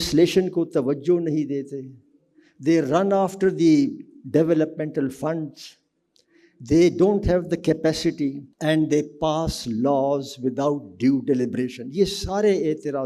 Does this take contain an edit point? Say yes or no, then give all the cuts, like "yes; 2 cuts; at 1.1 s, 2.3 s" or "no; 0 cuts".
yes; 1 cut; at 8.5 s